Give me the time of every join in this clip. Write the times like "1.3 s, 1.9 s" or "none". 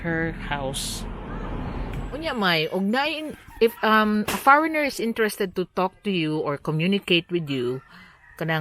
2.0 s